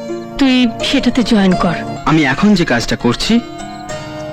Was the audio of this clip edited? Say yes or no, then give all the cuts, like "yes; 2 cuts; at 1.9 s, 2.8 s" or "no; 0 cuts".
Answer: yes; 1 cut; at 1.9 s